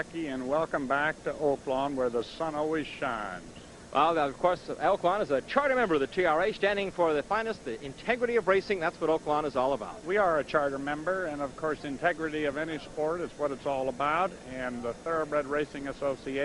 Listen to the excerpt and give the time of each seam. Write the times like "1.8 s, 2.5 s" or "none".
2.2 s